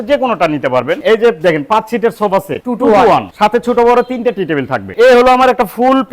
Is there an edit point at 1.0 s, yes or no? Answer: yes